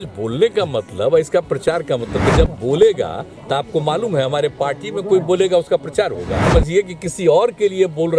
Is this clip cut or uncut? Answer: cut